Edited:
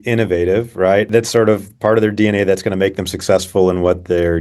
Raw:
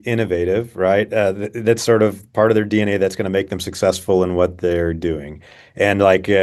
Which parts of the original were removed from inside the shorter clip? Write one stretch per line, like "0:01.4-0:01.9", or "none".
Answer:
0:01.1-0:01.6

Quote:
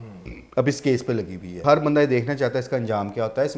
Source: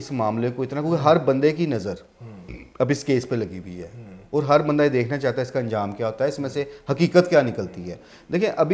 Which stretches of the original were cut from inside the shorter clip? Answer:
0:03.8-0:04.4

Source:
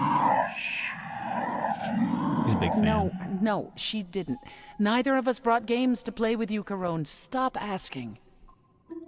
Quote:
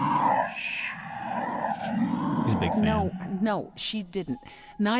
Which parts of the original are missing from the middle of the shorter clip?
none

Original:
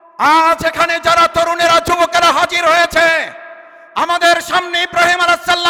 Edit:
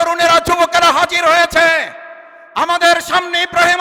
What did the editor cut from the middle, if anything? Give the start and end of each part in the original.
none

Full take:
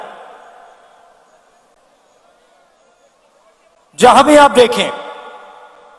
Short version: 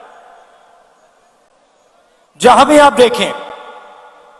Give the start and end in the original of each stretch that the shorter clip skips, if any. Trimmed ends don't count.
0:02.6-0:03.8

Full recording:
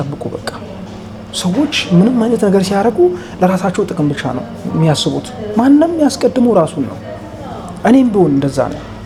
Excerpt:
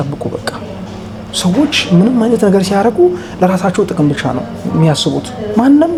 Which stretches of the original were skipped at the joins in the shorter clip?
none

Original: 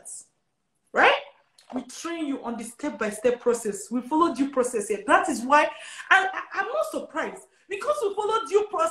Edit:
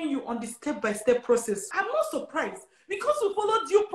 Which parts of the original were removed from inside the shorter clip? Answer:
0:03.8-0:06.4

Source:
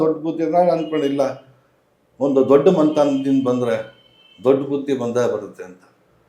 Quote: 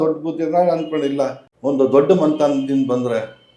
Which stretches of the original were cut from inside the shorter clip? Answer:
0:01.5-0:02.0

